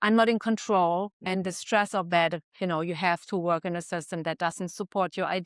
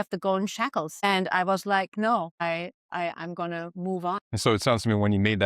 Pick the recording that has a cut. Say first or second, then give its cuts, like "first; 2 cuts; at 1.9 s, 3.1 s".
second; 3 cuts; at 0.9 s, 2.4 s, 4.2 s